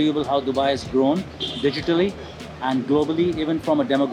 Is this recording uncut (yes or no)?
yes